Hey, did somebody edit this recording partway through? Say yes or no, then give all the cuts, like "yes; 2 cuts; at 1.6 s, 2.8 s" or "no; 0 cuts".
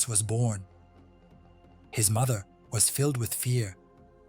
yes; 1 cut; at 2.6 s